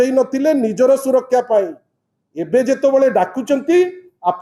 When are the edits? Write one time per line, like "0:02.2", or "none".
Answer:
none